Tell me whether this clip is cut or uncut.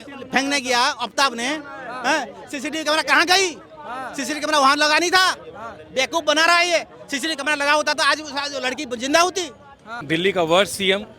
cut